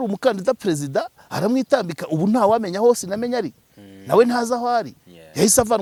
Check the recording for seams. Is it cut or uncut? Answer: uncut